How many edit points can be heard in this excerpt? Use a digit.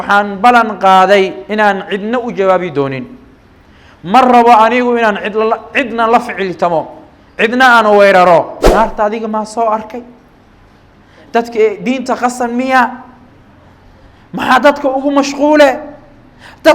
1